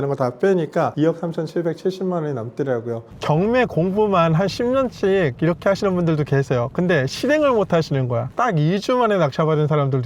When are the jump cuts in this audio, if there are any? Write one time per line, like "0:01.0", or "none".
0:03.1
0:08.3